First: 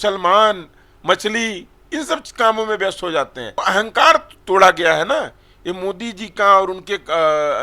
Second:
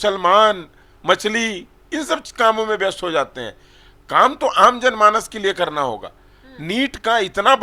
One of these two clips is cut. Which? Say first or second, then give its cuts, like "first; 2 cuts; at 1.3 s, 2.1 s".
first; 1 cut; at 3.6 s